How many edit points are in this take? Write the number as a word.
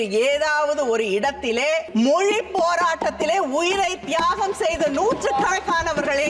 one